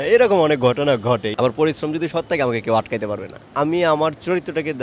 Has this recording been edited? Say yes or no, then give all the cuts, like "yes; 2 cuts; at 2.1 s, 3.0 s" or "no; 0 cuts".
yes; 2 cuts; at 1.3 s, 3.5 s